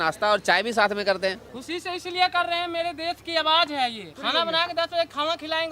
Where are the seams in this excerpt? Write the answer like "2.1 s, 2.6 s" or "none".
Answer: 1.5 s, 4.1 s